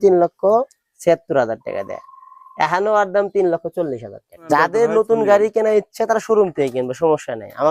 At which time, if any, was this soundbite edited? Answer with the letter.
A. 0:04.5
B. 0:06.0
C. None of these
A